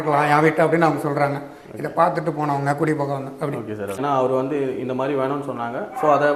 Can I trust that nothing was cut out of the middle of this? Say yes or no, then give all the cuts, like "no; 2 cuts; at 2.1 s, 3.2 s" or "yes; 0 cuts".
no; 1 cut; at 4.0 s